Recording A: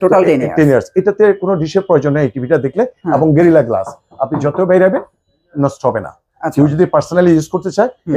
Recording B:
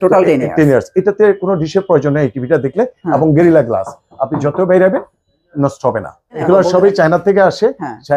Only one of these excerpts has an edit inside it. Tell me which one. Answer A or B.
B